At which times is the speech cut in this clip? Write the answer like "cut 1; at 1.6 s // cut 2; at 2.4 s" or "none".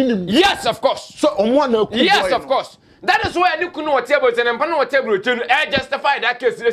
none